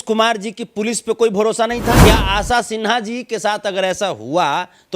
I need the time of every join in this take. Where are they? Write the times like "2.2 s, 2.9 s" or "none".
2.0 s